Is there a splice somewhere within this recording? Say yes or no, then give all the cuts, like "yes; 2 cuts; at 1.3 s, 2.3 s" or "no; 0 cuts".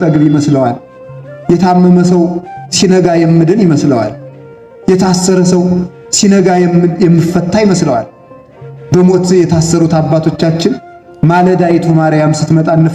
no; 0 cuts